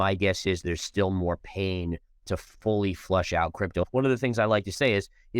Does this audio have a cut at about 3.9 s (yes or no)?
yes